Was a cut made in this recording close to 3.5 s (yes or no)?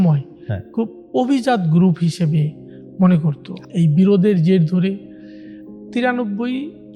yes